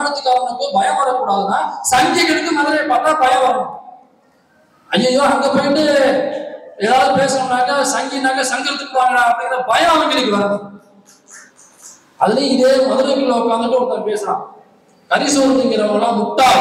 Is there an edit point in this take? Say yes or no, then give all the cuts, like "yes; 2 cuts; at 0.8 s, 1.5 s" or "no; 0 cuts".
no; 0 cuts